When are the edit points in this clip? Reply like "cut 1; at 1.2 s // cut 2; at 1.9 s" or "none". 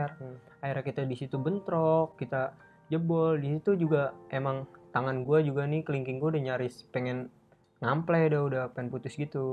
none